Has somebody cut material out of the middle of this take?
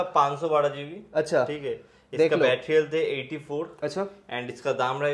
no; 0 cuts

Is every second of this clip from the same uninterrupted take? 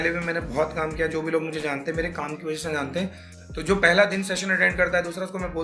no; 1 cut; at 3.3 s

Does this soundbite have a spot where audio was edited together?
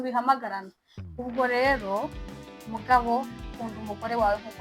no; 0 cuts

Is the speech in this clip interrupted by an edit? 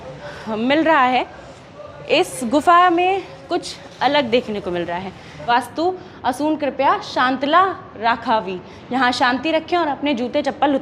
yes; 1 cut; at 5.3 s

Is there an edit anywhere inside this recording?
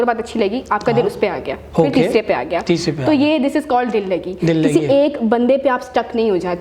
no; 0 cuts

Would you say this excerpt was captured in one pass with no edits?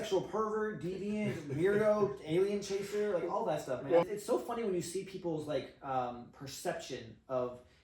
no; 1 cut; at 3.8 s

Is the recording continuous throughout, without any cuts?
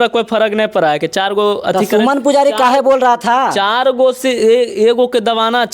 yes; 0 cuts

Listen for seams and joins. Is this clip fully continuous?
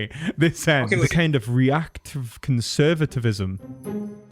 no; 1 cut; at 1.1 s

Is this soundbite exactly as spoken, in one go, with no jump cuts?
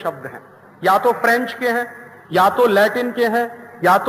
yes; 0 cuts

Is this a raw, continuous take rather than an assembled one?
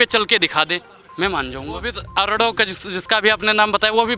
no; 1 cut; at 2.0 s

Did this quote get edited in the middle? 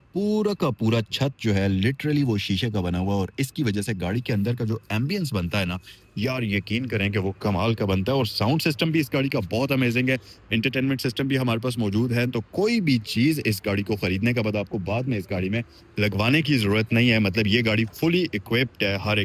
no; 0 cuts

